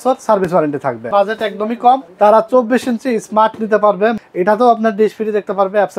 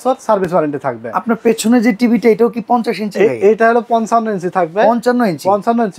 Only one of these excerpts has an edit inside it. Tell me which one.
first; 3 cuts; at 1.0 s, 2.1 s, 4.2 s

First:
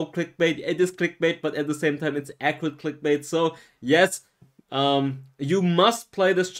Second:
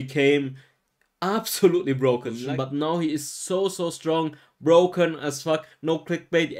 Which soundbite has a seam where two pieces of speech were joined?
second; 1 cut; at 2.3 s

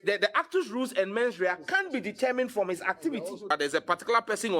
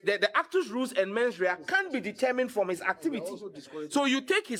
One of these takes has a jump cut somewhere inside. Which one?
first; 1 cut; at 3.5 s

